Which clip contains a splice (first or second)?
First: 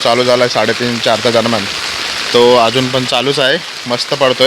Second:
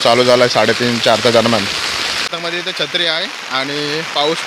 second